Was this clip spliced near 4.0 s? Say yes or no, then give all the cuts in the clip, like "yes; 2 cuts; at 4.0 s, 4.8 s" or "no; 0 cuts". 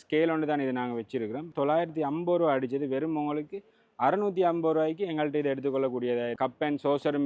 no; 2 cuts; at 1.5 s, 6.3 s